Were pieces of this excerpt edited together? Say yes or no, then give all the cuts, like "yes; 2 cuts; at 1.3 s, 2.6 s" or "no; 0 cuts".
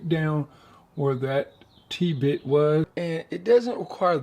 yes; 1 cut; at 2.9 s